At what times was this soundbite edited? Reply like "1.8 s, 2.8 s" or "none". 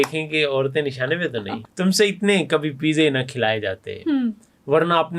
1.6 s